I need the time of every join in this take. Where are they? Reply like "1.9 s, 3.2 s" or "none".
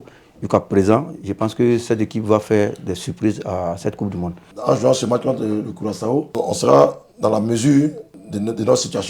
4.5 s, 6.3 s, 8.1 s